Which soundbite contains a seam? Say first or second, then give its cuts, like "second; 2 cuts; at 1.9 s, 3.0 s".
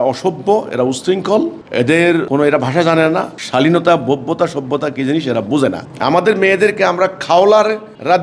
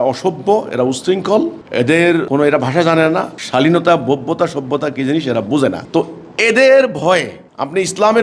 first; 1 cut; at 5.8 s